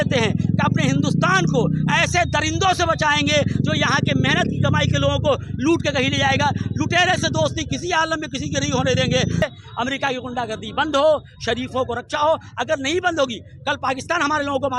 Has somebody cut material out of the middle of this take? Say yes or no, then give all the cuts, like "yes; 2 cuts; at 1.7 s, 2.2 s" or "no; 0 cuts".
yes; 1 cut; at 9.4 s